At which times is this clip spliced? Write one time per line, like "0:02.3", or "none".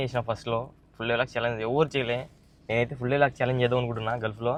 none